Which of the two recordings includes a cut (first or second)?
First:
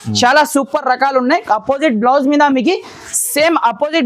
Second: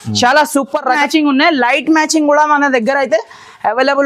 second